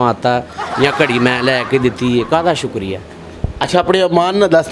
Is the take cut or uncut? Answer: uncut